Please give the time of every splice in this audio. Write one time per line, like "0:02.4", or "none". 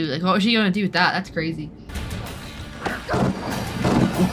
0:01.9